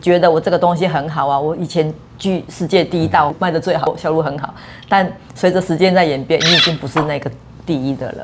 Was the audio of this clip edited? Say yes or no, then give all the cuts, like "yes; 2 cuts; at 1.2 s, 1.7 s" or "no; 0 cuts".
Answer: no; 0 cuts